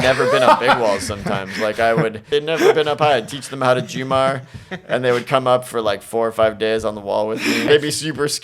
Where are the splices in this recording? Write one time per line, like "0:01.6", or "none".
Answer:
0:02.3
0:07.6